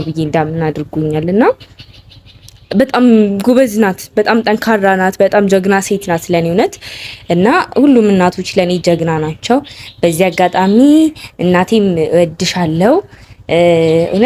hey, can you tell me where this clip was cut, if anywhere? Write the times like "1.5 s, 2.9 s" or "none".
none